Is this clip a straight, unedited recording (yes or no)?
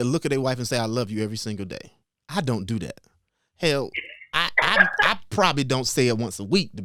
yes